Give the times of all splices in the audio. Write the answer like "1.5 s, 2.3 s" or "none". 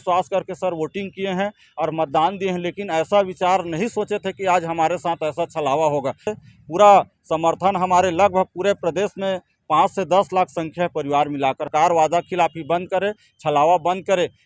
6.3 s, 11.7 s